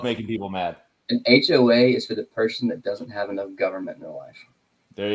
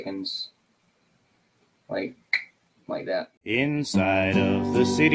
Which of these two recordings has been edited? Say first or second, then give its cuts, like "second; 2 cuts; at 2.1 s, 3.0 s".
second; 1 cut; at 3.3 s